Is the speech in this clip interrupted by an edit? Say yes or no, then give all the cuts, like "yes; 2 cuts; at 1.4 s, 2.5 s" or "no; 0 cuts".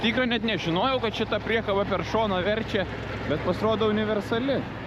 no; 0 cuts